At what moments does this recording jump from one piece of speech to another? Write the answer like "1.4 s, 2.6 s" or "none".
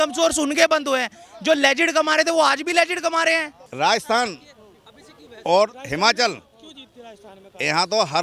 3.6 s